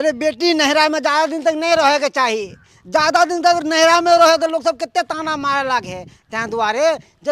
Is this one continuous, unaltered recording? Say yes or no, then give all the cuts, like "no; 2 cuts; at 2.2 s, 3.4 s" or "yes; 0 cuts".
yes; 0 cuts